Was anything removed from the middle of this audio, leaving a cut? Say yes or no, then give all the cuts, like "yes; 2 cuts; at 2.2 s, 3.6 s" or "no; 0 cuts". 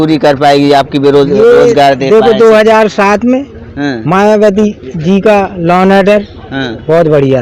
no; 0 cuts